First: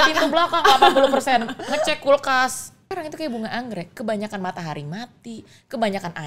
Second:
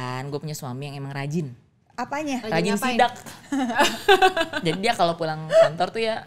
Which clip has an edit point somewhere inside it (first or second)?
first